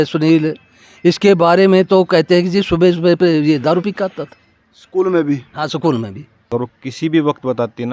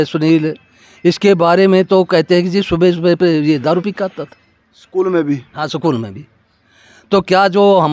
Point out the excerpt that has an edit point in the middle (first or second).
first